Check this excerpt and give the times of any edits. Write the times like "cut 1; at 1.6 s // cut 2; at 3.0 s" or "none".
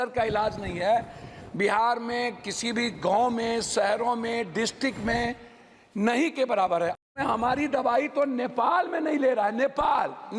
cut 1; at 7.0 s